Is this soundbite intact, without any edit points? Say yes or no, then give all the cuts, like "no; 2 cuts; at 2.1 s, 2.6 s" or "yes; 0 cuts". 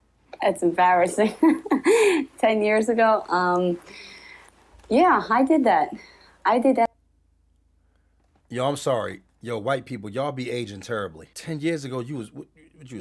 no; 1 cut; at 11.3 s